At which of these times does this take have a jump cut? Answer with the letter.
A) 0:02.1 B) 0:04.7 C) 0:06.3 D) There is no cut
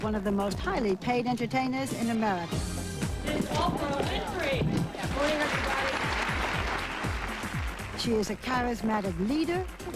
C